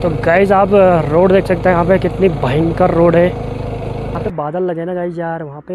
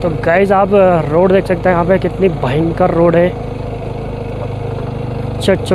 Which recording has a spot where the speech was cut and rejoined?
first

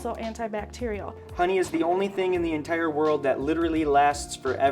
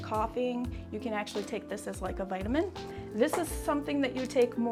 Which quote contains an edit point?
first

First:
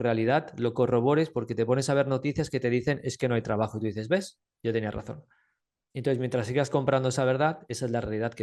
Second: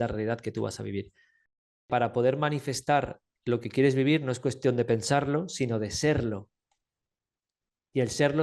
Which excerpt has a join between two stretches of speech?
second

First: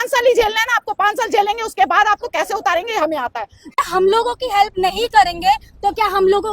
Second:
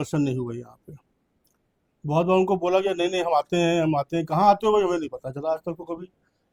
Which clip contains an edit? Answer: first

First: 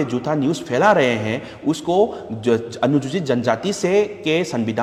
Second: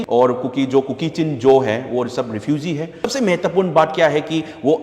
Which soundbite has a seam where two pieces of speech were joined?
second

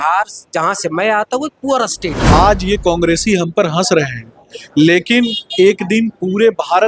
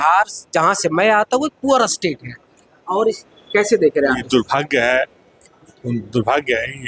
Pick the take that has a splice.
first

